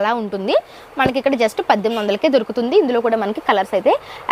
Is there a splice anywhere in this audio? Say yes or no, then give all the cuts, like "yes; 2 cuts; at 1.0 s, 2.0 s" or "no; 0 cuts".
no; 0 cuts